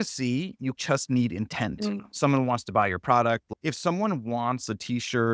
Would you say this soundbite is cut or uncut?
uncut